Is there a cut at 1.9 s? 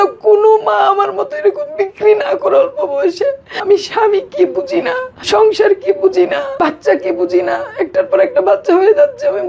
no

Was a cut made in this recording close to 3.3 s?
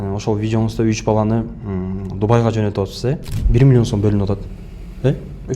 yes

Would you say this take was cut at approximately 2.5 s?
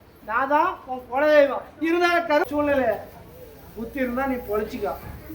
yes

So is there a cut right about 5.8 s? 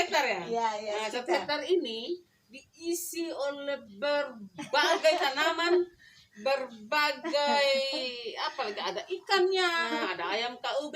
no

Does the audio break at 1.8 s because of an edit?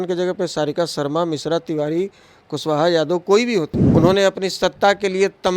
no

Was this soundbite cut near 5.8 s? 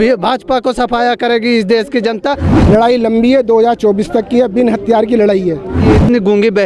yes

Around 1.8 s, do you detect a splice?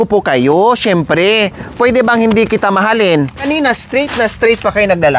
no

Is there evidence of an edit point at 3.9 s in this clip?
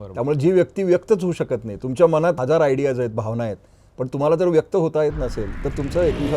no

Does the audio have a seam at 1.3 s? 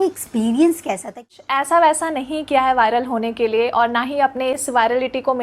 yes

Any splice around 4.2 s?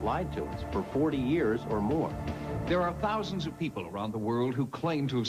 no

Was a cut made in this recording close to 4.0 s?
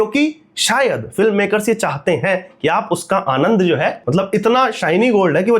yes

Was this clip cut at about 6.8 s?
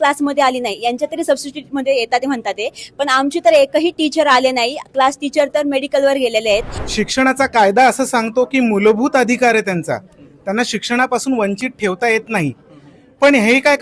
yes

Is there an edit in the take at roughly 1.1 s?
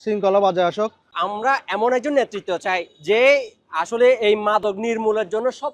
yes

